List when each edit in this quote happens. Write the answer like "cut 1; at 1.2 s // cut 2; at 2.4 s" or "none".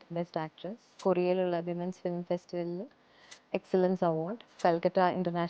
cut 1; at 0.9 s // cut 2; at 4.5 s